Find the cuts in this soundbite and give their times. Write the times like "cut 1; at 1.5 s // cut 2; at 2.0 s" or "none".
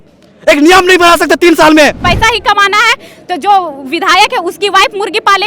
cut 1; at 2.0 s